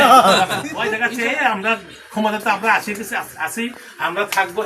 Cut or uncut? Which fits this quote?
cut